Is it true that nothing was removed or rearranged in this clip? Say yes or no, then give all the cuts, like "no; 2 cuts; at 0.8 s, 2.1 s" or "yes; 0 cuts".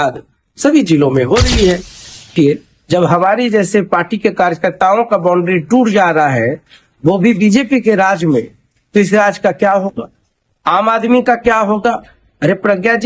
no; 1 cut; at 2.3 s